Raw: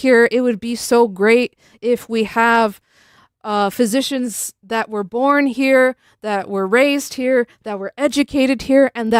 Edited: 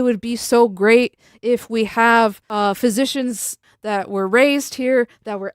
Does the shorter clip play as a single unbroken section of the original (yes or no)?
no